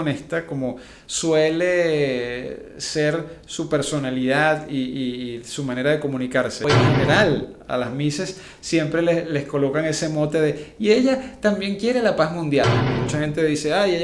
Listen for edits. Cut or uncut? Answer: cut